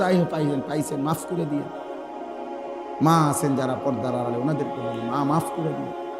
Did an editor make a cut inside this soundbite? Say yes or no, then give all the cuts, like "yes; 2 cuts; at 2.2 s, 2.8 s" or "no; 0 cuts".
yes; 2 cuts; at 1.6 s, 3.0 s